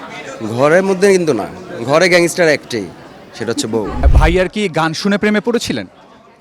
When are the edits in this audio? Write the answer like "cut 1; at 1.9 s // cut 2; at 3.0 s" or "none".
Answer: cut 1; at 4.0 s

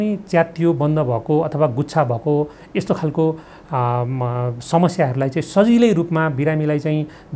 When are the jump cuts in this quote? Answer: none

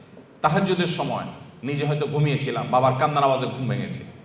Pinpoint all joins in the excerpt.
none

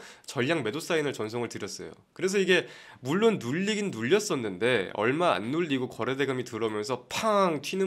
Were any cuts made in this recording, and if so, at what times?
none

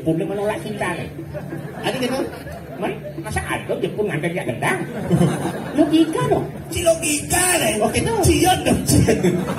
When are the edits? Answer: none

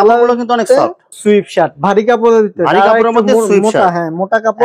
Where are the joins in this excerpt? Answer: cut 1; at 1.1 s

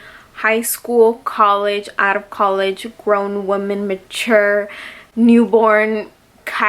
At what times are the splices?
none

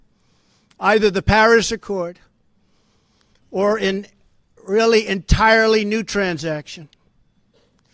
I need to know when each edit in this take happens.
cut 1; at 6.3 s

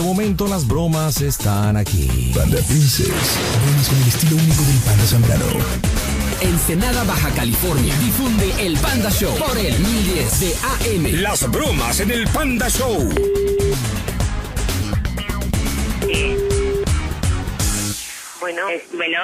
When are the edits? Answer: cut 1; at 9.1 s

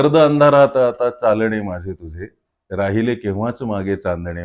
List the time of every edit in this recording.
none

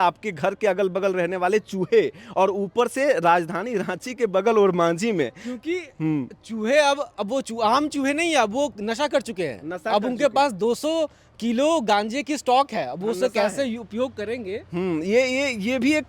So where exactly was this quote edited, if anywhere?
none

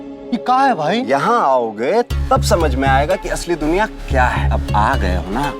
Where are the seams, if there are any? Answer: cut 1; at 1.0 s // cut 2; at 4.5 s

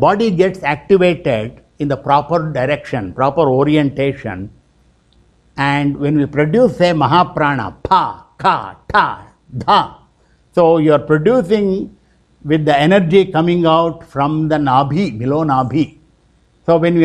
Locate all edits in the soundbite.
none

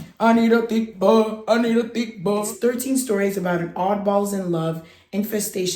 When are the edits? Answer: cut 1; at 2.5 s

